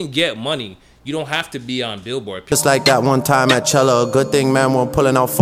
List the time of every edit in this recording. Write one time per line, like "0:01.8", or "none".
0:02.4